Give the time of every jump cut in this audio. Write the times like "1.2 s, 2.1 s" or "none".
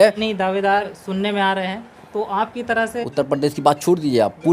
0.8 s, 3.0 s